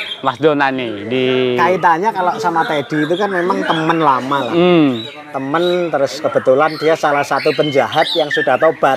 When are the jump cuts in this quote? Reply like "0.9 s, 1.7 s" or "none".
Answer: none